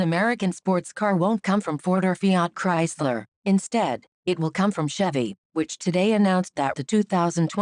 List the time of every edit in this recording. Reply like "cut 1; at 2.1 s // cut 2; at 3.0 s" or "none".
cut 1; at 1.2 s